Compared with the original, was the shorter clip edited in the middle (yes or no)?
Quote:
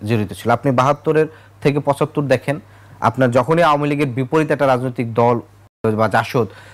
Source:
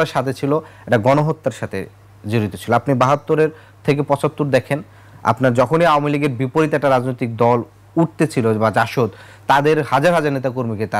yes